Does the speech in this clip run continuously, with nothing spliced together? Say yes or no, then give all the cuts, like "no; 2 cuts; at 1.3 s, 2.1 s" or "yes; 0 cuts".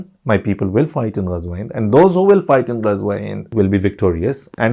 no; 1 cut; at 3.5 s